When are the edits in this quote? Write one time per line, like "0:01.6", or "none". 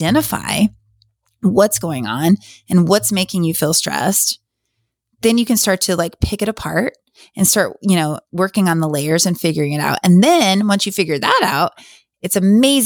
none